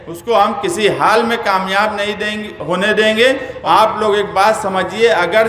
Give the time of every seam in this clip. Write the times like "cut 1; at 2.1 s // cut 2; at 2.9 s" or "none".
cut 1; at 3.5 s